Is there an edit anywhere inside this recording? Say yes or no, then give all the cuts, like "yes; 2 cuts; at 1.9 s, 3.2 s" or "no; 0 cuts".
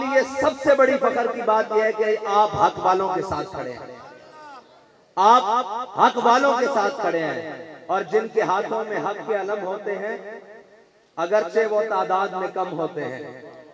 no; 0 cuts